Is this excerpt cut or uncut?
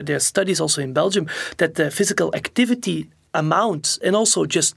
uncut